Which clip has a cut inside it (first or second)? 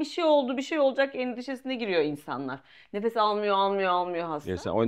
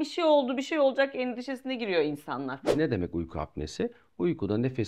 second